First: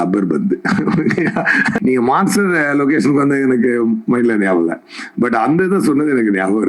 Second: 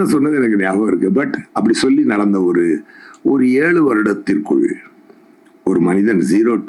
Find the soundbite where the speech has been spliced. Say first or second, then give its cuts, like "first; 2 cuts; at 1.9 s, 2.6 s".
first; 1 cut; at 1.8 s